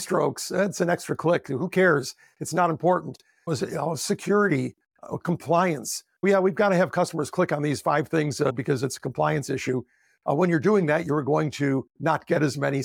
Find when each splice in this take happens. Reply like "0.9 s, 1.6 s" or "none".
8.5 s